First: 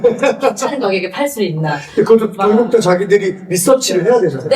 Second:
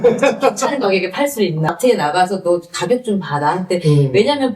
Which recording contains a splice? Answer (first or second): second